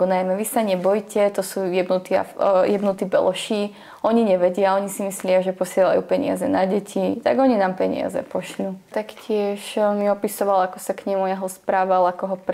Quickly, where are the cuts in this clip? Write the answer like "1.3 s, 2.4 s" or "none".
8.9 s